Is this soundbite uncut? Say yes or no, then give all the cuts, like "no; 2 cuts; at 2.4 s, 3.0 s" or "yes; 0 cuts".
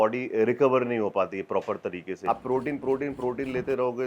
no; 1 cut; at 2.1 s